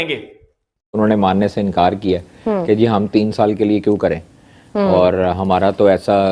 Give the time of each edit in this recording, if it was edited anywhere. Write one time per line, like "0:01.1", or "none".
0:01.0